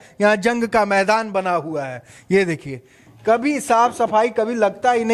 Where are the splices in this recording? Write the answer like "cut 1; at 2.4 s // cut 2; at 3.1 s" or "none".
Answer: none